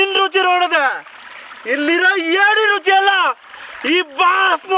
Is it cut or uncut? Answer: uncut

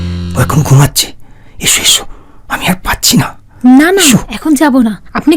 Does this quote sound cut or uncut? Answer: uncut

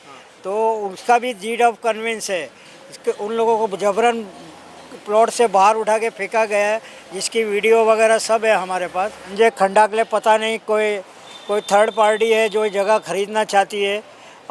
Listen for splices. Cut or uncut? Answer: cut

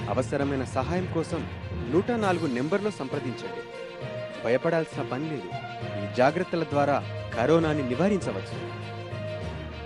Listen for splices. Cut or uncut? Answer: uncut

